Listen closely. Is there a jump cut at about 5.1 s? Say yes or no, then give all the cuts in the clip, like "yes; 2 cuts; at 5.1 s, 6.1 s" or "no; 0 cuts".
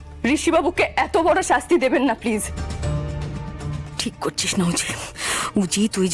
no; 1 cut; at 3.9 s